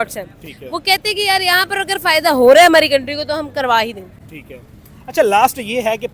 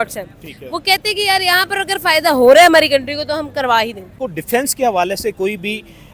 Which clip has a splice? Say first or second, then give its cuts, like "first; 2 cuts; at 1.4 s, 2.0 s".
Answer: second; 1 cut; at 4.2 s